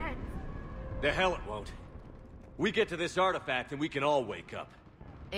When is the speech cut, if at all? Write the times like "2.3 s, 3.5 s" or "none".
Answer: none